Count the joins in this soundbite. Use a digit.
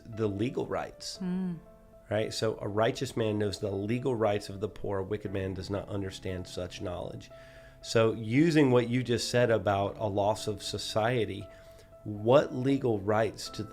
0